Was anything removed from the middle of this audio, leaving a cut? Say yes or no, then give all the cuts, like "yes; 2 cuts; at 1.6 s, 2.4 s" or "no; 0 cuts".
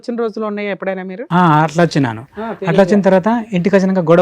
no; 0 cuts